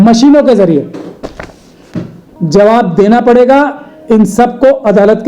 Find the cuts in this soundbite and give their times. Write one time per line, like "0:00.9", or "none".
0:02.2